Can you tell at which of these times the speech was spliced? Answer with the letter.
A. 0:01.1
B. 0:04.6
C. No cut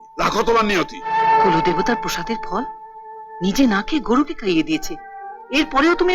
A